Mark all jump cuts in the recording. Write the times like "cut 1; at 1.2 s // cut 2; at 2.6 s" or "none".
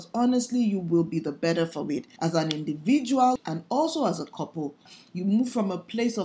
cut 1; at 2.1 s // cut 2; at 3.4 s // cut 3; at 5.0 s